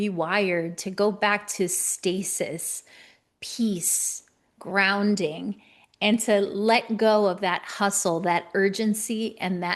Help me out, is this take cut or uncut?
uncut